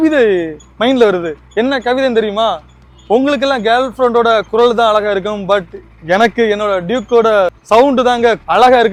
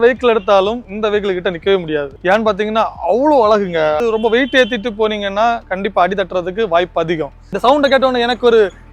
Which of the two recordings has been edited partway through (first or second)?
second